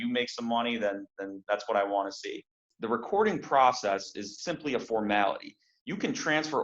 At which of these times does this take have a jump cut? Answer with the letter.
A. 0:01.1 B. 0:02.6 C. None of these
B